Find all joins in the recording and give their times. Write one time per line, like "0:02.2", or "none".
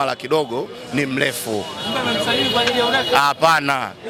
none